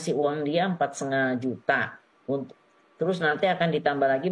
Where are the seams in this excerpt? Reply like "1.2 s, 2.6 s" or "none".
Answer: none